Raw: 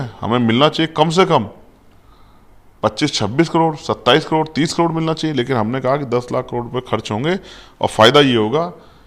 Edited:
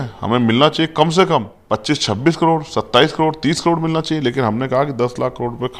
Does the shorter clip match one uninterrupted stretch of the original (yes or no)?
no